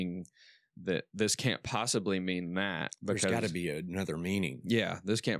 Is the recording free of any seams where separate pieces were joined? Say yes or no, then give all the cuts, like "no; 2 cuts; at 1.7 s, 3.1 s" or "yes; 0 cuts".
yes; 0 cuts